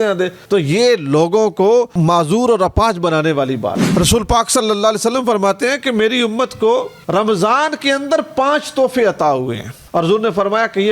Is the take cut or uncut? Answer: cut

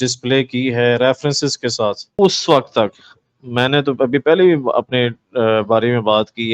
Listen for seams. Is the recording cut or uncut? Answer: cut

